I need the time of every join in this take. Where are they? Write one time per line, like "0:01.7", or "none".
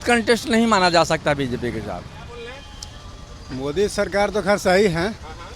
0:02.3